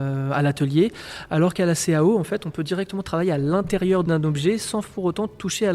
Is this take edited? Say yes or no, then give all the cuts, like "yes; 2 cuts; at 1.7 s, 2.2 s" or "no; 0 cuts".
yes; 1 cut; at 4.0 s